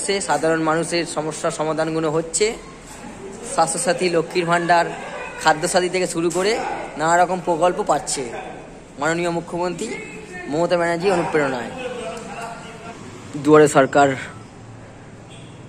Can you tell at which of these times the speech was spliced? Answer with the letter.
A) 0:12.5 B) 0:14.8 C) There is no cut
A